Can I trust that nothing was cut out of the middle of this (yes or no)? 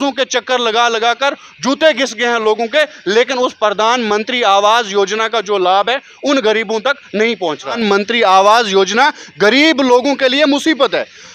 no